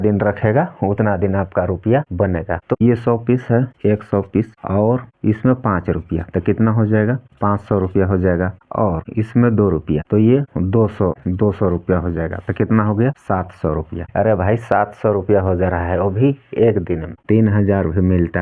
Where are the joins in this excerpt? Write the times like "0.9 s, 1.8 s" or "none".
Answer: 2.8 s, 17.1 s